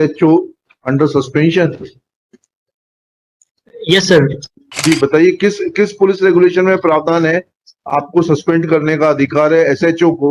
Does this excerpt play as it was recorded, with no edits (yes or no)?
no